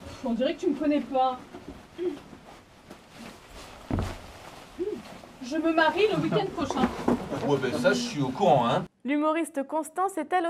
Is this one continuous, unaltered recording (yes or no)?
yes